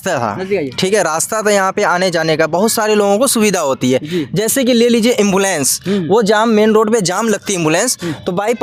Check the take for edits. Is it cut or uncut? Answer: uncut